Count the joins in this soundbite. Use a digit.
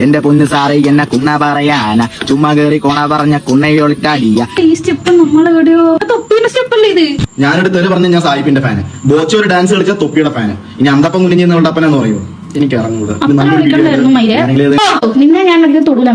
2